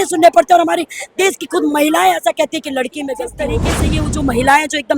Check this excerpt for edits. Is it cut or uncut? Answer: cut